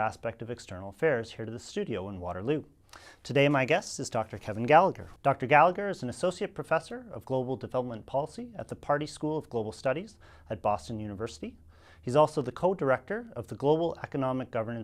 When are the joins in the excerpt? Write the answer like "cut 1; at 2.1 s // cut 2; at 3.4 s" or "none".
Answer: none